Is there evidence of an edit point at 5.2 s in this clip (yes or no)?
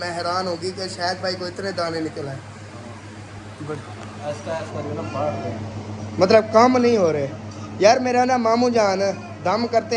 no